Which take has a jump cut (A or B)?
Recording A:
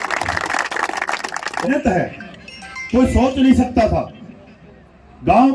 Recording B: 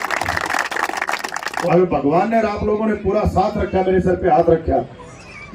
B